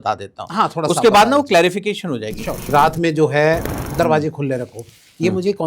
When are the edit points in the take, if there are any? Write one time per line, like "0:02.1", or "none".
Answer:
0:02.7